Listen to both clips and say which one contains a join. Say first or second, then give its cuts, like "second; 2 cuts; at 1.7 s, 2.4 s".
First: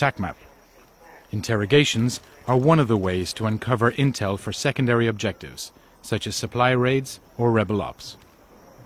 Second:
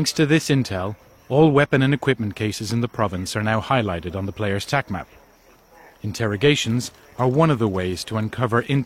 first; 1 cut; at 8.0 s